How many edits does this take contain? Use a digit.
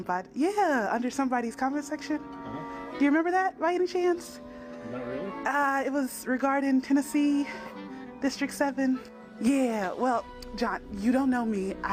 0